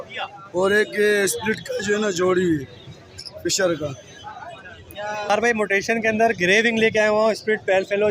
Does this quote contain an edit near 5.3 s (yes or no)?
yes